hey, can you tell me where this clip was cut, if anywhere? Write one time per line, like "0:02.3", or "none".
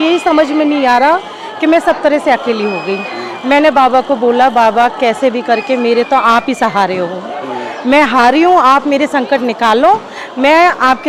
none